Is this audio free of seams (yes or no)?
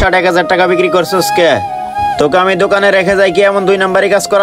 yes